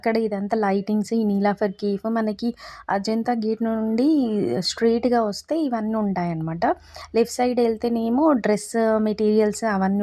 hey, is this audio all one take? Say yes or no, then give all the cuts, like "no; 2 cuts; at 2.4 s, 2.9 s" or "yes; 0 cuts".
yes; 0 cuts